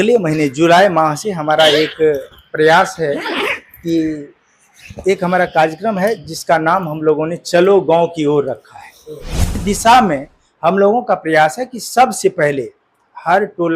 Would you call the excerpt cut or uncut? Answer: cut